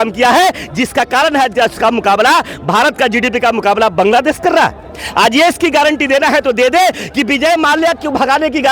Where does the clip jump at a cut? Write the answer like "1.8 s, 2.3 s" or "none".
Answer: none